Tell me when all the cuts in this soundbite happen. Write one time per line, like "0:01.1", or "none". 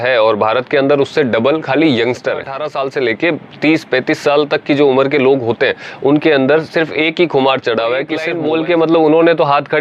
0:02.6
0:08.3